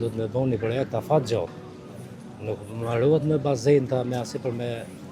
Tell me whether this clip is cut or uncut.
uncut